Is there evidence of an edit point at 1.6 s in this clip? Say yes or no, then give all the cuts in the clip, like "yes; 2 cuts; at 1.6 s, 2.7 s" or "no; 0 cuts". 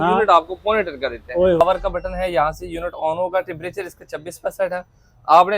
yes; 1 cut; at 1.6 s